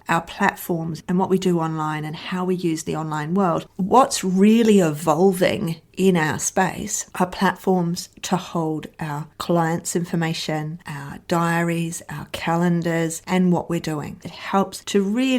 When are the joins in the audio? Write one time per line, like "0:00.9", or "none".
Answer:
0:01.0
0:03.6
0:14.2

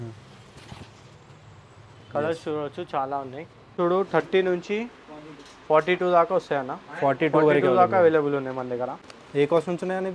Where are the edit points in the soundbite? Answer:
0:03.7
0:09.0

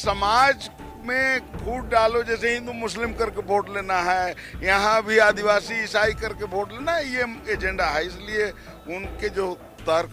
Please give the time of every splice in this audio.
none

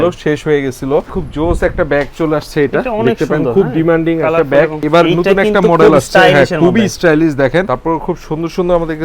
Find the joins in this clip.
0:01.2
0:04.8
0:07.7

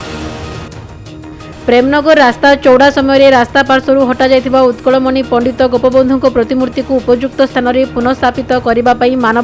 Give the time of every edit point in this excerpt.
0:01.2

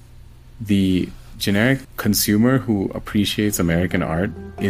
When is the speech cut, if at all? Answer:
0:01.9

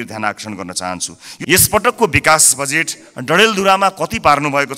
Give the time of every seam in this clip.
0:01.3

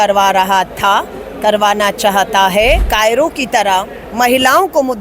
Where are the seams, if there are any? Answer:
0:02.8

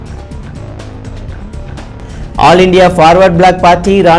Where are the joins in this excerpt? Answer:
0:01.2
0:02.2

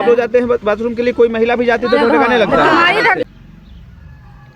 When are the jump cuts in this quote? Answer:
0:03.2

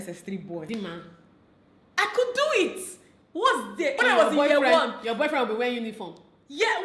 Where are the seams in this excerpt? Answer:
0:04.0

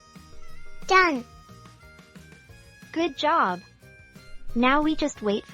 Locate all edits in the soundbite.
0:01.3
0:02.9

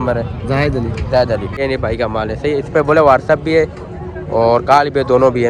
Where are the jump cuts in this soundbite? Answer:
0:01.6

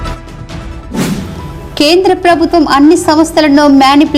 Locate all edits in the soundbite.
0:01.0

